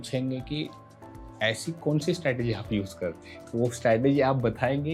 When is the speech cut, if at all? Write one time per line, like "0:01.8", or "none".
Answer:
none